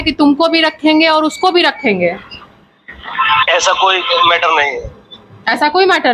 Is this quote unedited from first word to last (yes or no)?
yes